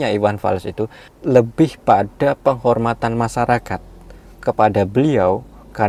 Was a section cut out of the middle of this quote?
no; 0 cuts

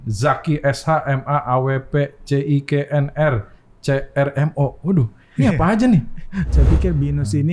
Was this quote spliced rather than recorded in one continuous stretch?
yes; 1 cut; at 6.5 s

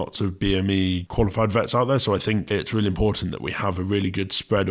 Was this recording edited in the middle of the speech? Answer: yes; 2 cuts; at 1.0 s, 2.4 s

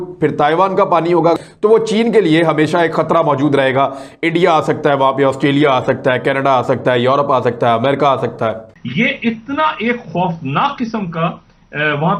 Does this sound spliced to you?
yes; 2 cuts; at 1.4 s, 8.8 s

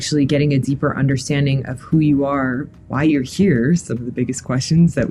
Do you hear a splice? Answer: no; 0 cuts

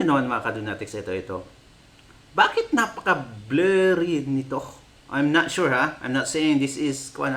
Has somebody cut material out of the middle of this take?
no; 0 cuts

